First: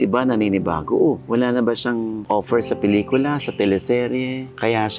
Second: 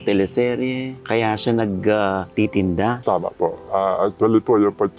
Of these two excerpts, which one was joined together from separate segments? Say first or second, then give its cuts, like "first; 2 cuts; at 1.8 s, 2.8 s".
second; 1 cut; at 3.0 s